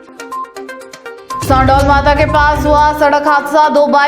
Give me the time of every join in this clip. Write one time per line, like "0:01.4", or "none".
0:01.5